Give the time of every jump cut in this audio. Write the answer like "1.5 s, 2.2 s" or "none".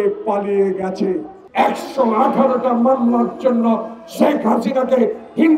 1.4 s